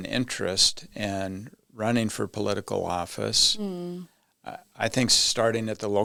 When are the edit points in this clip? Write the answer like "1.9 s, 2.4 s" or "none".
none